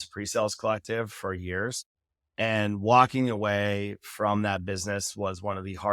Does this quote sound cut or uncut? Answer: uncut